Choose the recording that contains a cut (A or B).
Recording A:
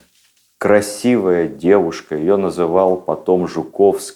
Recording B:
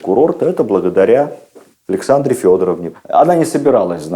B